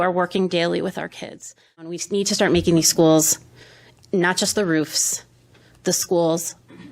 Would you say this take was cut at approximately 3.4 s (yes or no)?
no